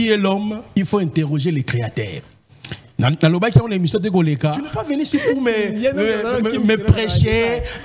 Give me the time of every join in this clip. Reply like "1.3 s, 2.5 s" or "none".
4.8 s